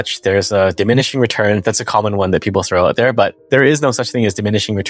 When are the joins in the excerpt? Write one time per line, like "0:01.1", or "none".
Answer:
0:03.4